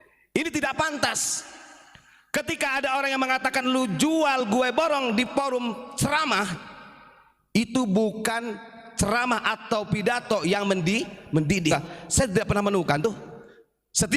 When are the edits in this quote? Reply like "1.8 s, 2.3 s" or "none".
11.7 s